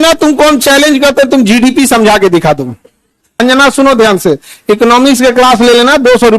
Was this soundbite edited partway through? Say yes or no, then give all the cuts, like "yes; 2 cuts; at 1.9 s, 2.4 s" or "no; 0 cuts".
yes; 1 cut; at 3.4 s